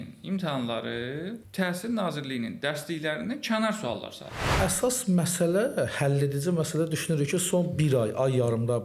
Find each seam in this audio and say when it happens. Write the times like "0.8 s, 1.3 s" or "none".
1.4 s, 4.5 s